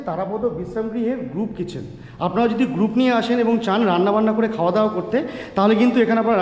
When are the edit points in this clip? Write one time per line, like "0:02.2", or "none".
none